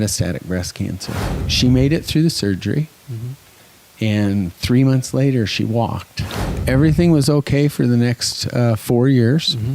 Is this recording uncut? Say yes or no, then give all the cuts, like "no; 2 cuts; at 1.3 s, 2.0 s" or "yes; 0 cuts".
no; 2 cuts; at 1.5 s, 6.5 s